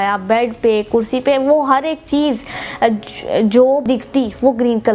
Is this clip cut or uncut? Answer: uncut